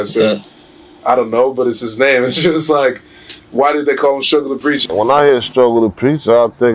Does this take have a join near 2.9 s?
no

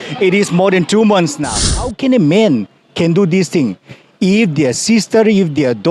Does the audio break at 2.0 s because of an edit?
yes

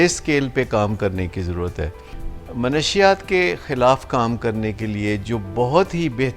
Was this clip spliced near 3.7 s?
no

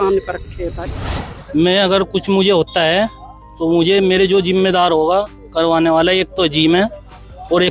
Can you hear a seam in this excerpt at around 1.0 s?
yes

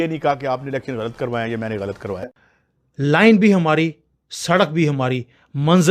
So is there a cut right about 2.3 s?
yes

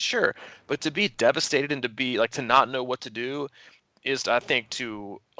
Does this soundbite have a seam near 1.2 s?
no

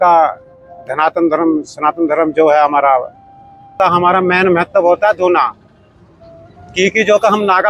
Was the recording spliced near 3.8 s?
yes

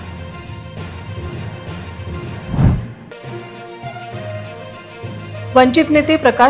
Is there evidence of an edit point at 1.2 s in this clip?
no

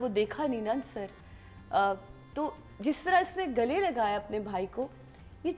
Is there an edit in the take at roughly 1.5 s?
no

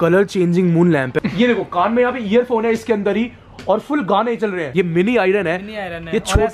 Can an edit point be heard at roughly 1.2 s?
yes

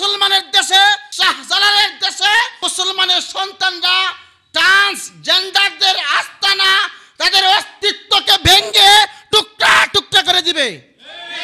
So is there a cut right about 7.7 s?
no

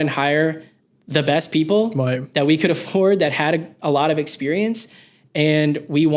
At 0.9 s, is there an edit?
no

